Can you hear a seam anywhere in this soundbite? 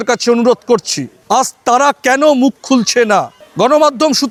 no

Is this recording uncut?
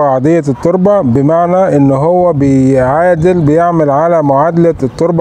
yes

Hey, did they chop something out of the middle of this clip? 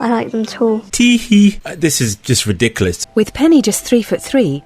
yes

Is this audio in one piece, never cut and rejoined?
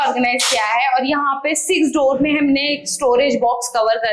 yes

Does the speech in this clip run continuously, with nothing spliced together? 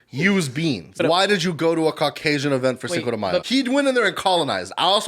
no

